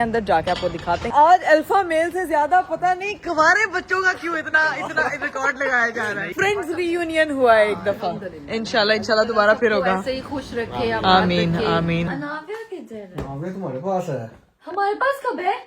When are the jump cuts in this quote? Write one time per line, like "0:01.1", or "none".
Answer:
0:01.1
0:06.3
0:12.1